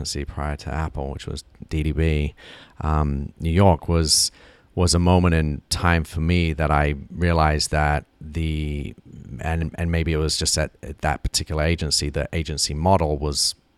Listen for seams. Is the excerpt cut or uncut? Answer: uncut